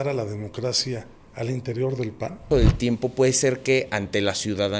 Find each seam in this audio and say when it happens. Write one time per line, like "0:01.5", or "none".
0:02.5